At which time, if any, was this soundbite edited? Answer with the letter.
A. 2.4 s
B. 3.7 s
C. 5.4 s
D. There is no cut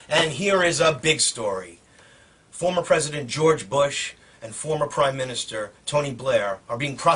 C